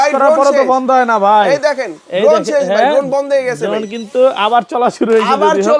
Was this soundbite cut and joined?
no; 0 cuts

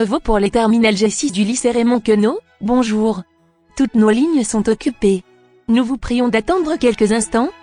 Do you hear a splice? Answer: no; 0 cuts

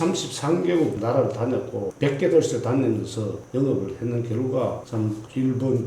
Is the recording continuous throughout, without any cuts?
no; 2 cuts; at 1.0 s, 1.9 s

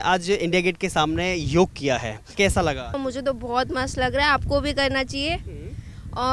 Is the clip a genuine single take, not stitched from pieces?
no; 2 cuts; at 2.2 s, 3.0 s

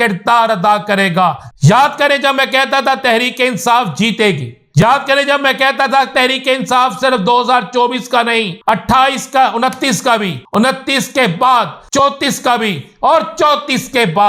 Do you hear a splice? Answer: yes; 5 cuts; at 1.4 s, 4.8 s, 8.6 s, 10.4 s, 12.0 s

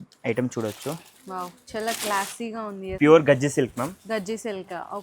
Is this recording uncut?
no; 1 cut; at 2.9 s

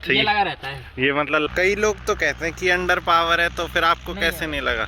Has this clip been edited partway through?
yes; 1 cut; at 1.5 s

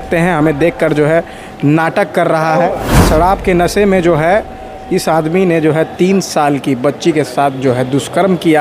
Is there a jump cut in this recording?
yes; 1 cut; at 2.9 s

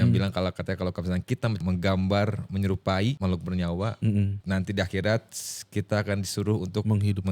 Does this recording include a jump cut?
yes; 3 cuts; at 1.6 s, 3.2 s, 4.4 s

